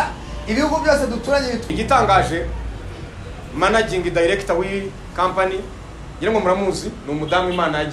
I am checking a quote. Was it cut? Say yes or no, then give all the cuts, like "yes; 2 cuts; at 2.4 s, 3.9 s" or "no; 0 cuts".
yes; 1 cut; at 1.6 s